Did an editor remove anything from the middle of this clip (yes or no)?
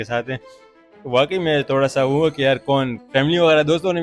yes